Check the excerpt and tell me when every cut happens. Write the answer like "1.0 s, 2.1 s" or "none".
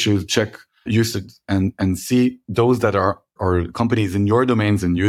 1.1 s, 2.4 s, 3.3 s